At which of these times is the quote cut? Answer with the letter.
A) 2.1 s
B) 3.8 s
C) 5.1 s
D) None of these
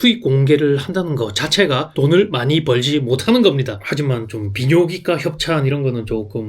B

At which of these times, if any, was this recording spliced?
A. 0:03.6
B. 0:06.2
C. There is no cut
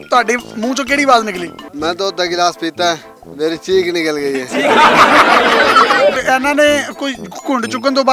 B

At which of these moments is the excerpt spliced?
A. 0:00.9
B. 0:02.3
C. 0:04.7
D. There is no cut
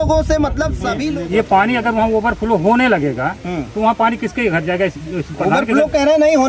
A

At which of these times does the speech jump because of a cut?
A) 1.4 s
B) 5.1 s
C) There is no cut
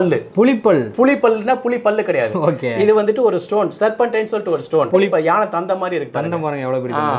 B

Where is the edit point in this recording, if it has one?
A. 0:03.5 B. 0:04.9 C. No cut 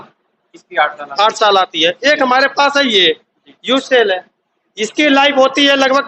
C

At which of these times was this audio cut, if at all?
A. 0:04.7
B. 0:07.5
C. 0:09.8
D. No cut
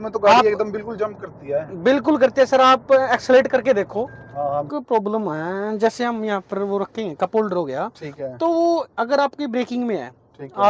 A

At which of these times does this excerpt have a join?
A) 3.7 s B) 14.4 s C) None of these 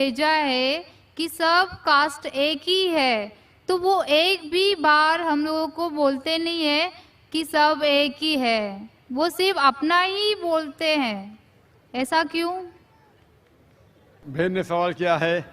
B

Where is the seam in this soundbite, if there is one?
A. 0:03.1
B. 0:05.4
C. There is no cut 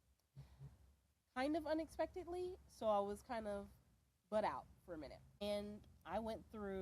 B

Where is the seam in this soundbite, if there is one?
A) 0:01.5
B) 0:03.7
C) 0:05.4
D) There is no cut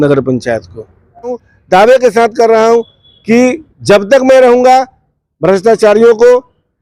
A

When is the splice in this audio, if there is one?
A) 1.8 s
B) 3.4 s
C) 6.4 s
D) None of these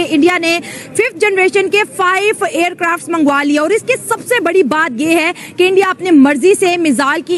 D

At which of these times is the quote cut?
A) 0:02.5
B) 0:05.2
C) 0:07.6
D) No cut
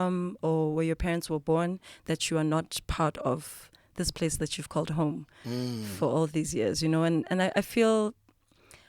D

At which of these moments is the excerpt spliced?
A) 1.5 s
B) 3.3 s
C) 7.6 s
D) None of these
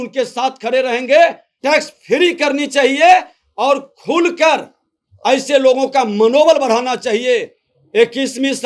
A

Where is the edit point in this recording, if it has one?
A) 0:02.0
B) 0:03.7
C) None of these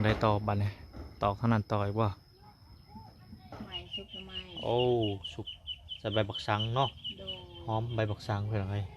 B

